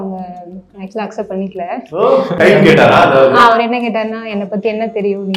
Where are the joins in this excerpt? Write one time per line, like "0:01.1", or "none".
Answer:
0:02.3
0:03.5